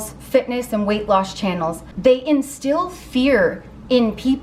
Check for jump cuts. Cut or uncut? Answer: cut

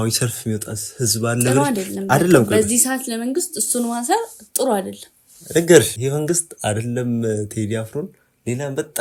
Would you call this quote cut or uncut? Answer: uncut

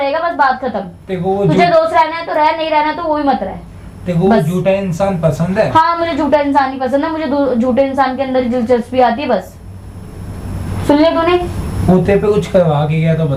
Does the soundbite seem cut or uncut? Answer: uncut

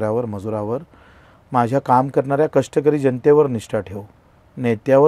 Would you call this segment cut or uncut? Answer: uncut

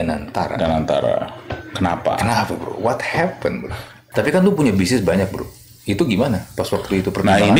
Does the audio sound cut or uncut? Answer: cut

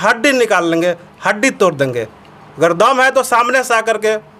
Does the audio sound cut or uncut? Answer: uncut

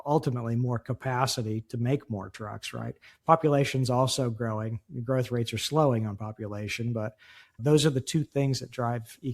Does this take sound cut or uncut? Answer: cut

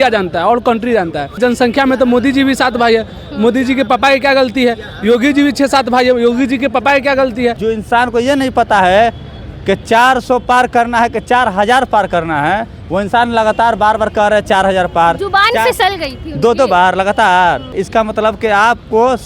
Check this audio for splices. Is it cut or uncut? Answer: cut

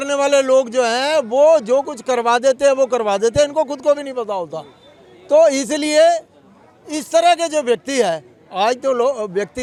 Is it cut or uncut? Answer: uncut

